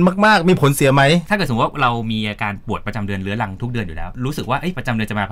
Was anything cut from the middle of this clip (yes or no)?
yes